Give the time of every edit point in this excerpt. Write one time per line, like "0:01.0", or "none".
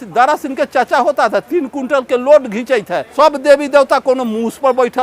0:03.0